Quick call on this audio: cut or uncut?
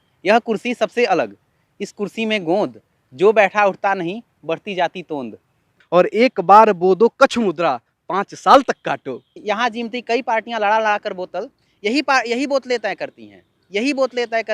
cut